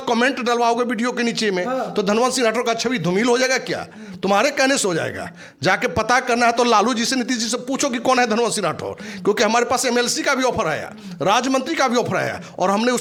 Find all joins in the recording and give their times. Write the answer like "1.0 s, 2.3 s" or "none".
none